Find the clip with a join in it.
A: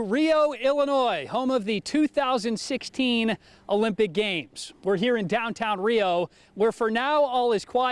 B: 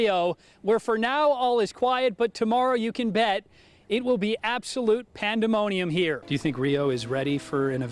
B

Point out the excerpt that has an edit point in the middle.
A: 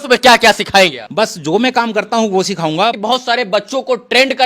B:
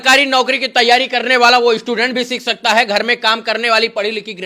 A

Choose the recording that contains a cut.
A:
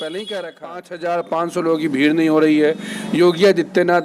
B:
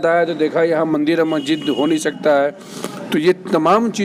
A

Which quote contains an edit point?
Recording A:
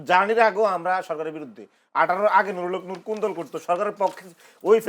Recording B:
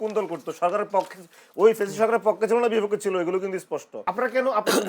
B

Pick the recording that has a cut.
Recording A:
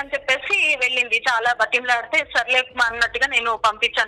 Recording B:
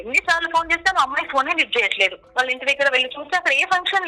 B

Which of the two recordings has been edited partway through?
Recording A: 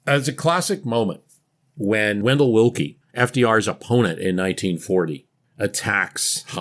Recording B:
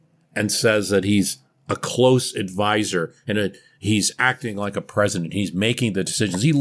A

